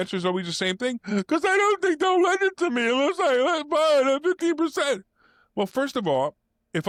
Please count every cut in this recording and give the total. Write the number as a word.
zero